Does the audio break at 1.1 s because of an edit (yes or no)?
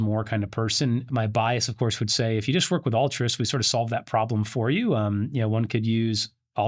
yes